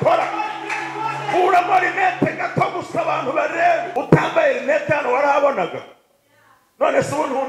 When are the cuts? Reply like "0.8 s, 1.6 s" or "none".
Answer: 3.9 s